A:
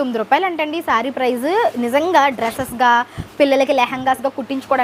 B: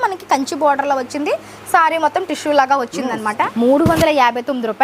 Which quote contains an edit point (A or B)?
B